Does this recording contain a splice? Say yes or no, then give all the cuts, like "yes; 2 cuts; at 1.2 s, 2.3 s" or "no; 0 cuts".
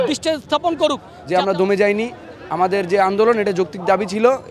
yes; 1 cut; at 1.1 s